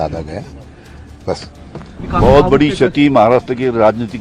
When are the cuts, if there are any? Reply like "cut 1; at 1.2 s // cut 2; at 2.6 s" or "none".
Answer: cut 1; at 2.0 s

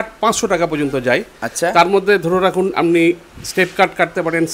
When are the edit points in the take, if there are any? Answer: none

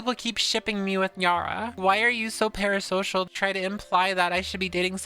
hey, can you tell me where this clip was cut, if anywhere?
cut 1; at 1.8 s // cut 2; at 3.3 s

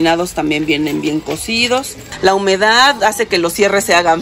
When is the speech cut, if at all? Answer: cut 1; at 2.0 s

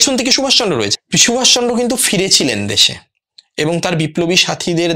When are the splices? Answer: cut 1; at 0.9 s

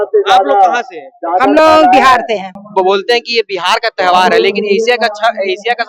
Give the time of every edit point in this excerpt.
cut 1; at 2.6 s

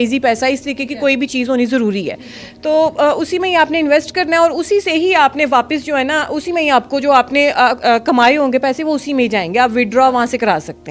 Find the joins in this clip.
none

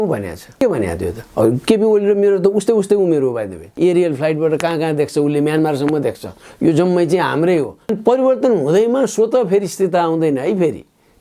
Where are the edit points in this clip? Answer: cut 1; at 3.6 s // cut 2; at 7.9 s

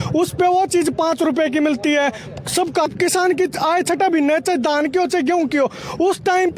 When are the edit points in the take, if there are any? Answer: cut 1; at 2.9 s

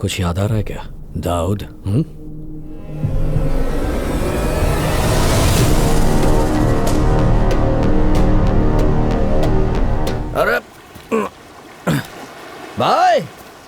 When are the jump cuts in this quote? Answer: cut 1; at 10.2 s

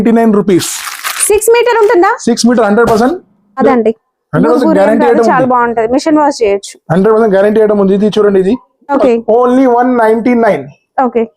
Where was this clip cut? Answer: cut 1; at 3.6 s // cut 2; at 9.0 s

